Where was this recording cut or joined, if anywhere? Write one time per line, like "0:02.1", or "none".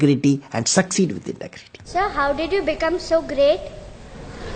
0:01.9